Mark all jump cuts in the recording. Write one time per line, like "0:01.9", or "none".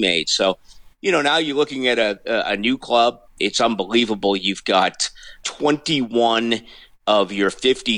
0:03.3
0:05.4